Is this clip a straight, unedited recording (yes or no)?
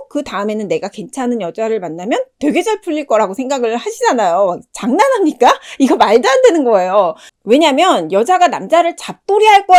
yes